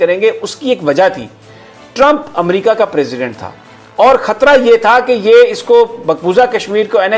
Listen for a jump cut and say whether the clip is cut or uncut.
uncut